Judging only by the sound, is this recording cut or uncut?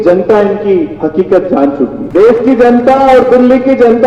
cut